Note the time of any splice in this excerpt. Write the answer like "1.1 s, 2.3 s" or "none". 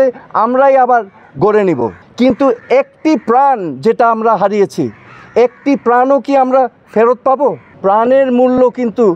2.0 s, 7.7 s